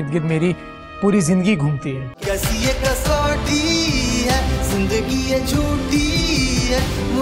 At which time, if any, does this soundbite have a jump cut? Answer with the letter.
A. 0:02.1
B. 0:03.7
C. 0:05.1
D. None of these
A